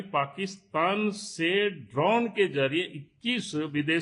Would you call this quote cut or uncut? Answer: uncut